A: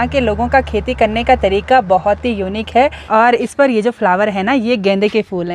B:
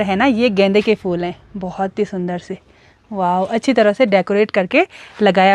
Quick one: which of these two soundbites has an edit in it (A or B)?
A